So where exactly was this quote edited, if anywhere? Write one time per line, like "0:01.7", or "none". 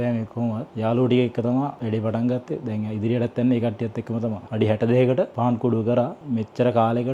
0:04.5